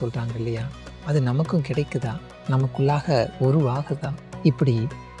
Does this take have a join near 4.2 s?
yes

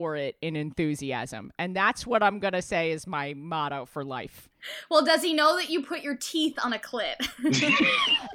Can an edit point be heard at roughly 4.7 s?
yes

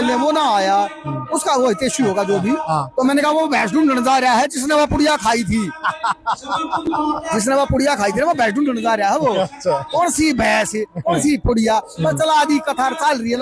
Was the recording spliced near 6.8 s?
no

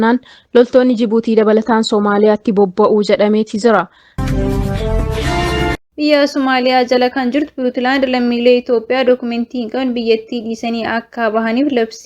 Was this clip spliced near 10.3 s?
no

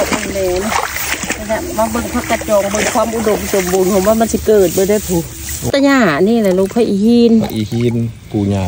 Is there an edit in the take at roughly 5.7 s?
yes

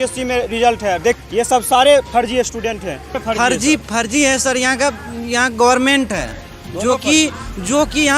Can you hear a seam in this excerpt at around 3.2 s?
yes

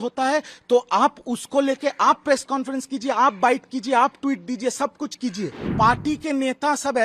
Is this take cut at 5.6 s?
yes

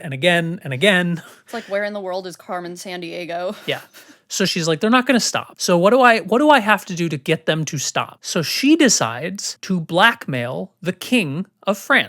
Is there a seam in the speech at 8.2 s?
no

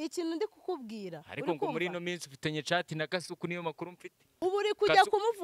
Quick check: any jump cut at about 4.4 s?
yes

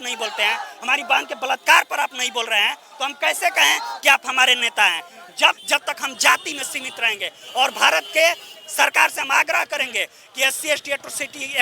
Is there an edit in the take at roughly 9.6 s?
no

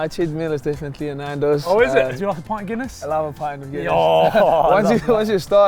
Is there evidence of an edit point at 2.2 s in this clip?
yes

